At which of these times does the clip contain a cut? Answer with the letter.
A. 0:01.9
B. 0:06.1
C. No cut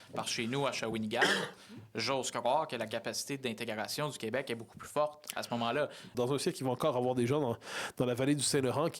B